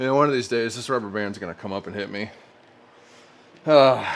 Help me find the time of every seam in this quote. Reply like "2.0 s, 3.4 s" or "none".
none